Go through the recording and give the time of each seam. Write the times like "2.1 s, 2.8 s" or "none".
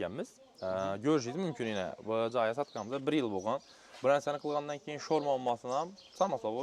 none